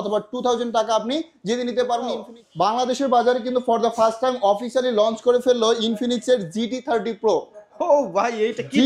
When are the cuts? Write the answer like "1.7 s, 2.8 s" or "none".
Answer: 2.3 s

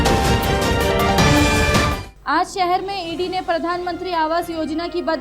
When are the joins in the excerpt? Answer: 2.1 s

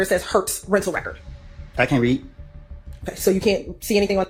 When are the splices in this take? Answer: none

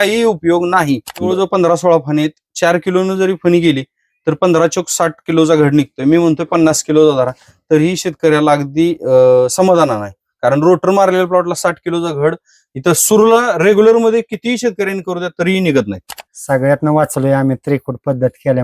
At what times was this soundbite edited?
1.3 s, 16.1 s

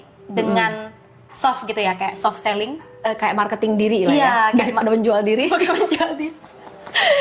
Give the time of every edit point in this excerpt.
none

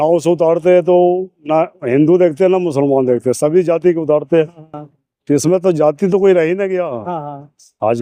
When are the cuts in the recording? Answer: none

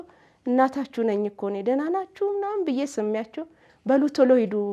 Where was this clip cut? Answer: none

